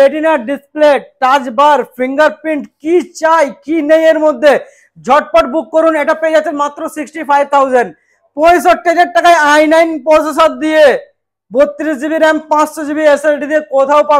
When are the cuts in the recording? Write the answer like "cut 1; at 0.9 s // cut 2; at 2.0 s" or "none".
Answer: none